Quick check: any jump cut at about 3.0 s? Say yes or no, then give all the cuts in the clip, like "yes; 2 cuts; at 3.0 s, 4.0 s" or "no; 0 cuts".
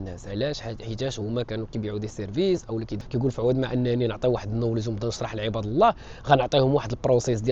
yes; 1 cut; at 3.0 s